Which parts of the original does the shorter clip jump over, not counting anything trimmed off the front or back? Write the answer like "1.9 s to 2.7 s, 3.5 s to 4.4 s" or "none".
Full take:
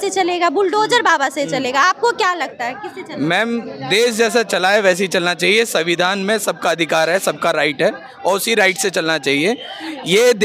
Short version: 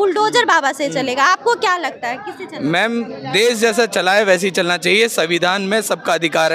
none

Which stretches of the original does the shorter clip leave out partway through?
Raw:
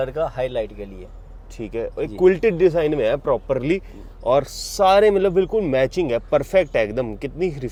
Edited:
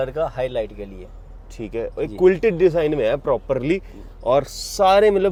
none

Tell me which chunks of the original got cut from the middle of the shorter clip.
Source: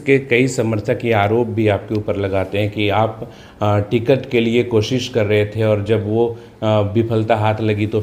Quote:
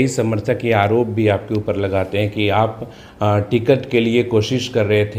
none

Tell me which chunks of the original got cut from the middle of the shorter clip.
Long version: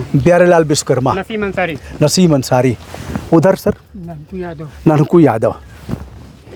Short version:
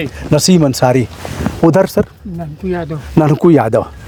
none

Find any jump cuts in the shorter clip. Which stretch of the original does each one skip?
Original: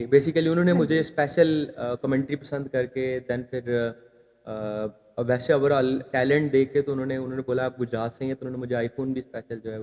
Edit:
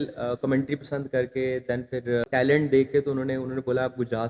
3.9 s to 6.1 s

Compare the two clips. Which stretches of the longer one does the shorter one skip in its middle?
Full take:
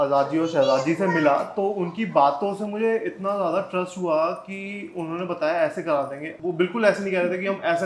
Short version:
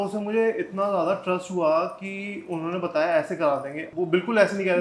none

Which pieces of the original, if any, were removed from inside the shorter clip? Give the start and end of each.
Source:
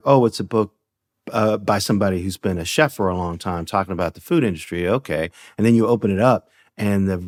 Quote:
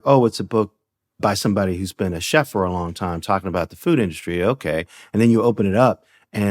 1.2 s to 1.6 s

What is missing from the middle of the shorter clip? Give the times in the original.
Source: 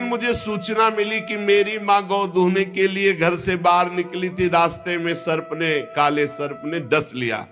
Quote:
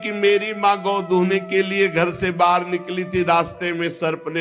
none

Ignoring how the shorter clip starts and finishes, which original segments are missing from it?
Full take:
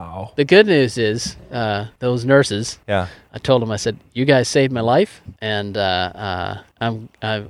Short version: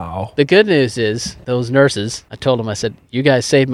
1.3 s to 1.9 s, 2.7 s to 3.2 s

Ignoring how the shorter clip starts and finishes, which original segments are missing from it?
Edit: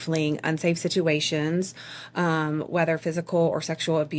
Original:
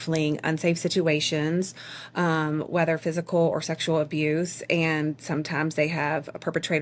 none

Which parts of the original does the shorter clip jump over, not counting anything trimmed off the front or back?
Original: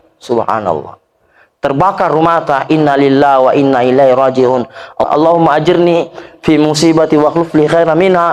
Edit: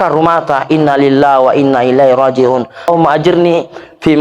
4.9 s to 5.3 s

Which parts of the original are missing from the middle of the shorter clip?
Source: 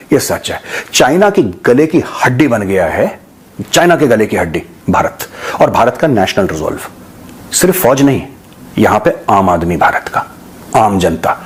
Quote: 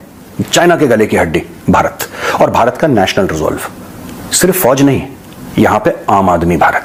none

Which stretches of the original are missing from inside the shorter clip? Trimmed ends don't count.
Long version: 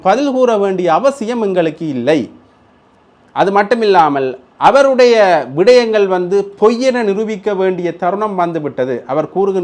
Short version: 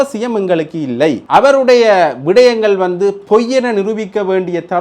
2.3 s to 4.5 s

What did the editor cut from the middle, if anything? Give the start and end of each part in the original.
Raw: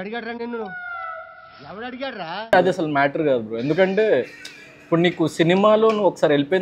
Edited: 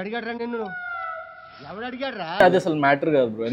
2.4 s to 2.5 s

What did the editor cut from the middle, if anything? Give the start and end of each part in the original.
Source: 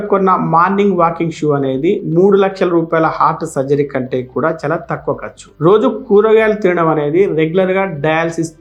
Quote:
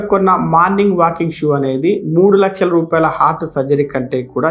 none

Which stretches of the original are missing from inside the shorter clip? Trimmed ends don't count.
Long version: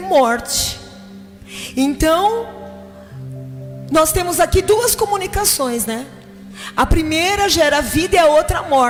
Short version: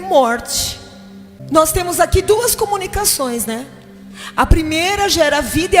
1.4 s to 3.8 s

